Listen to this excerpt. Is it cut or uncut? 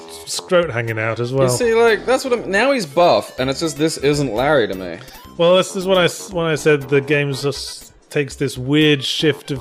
uncut